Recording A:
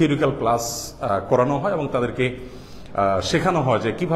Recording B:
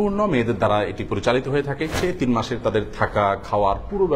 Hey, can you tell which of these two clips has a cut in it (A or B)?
B